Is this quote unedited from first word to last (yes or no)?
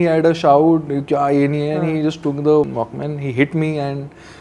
no